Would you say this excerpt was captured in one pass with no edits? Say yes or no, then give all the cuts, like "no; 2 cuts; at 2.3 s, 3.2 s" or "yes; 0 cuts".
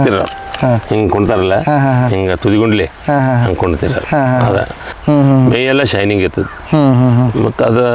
no; 1 cut; at 4.9 s